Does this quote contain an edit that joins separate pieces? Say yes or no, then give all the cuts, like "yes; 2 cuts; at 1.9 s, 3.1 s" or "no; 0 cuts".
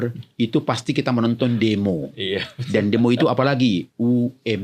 no; 0 cuts